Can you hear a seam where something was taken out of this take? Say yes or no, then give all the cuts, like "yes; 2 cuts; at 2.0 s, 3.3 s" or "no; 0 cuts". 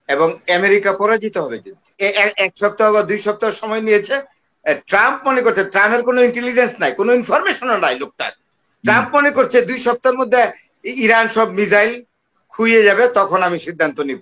yes; 1 cut; at 2.0 s